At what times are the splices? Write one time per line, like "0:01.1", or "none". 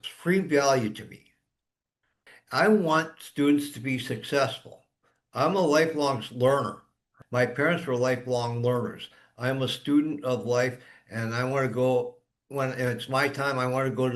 none